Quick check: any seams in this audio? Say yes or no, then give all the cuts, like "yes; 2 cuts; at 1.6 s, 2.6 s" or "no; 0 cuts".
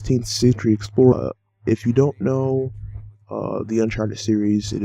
no; 0 cuts